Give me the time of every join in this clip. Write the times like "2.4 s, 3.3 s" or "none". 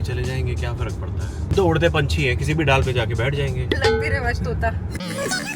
4.1 s